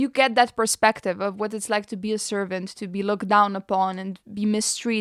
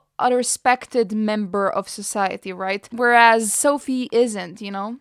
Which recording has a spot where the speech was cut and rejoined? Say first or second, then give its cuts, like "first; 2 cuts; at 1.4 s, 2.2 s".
second; 1 cut; at 2.9 s